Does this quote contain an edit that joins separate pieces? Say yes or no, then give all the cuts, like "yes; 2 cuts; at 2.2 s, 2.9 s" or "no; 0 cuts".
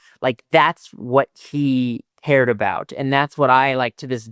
yes; 1 cut; at 2.1 s